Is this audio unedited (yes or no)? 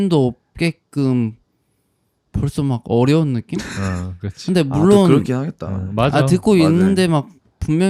yes